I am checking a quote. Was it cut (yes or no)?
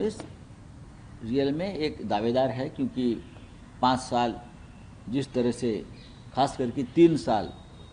no